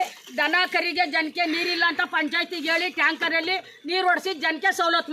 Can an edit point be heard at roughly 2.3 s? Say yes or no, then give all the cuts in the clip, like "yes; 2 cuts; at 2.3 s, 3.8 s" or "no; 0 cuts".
no; 0 cuts